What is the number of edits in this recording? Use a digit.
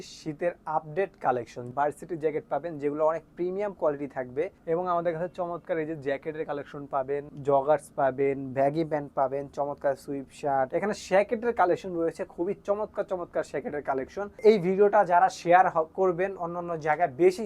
5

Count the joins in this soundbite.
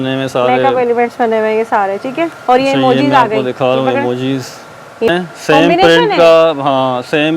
1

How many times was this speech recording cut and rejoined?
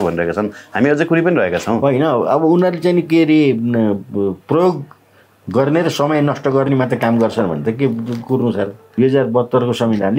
1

